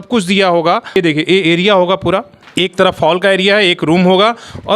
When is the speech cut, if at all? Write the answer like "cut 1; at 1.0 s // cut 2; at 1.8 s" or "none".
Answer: cut 1; at 0.9 s // cut 2; at 2.4 s